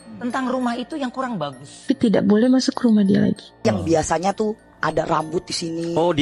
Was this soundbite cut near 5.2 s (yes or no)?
no